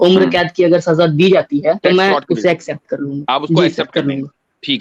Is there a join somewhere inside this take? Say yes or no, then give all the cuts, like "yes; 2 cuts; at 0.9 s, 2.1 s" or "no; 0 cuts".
yes; 2 cuts; at 1.8 s, 3.2 s